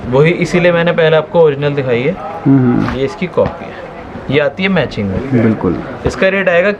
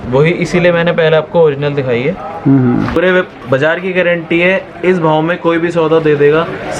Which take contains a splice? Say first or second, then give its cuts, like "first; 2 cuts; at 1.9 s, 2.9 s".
second; 1 cut; at 3.0 s